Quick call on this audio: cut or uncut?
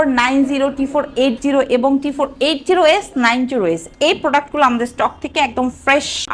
uncut